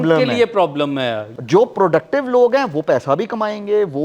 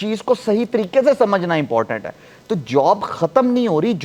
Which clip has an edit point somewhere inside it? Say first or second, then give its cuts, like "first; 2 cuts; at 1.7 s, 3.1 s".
first; 1 cut; at 1.3 s